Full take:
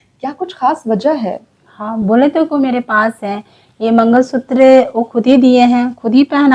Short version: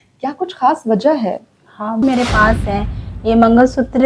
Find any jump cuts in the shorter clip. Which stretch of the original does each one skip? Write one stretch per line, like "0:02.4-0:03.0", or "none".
0:02.0-0:02.6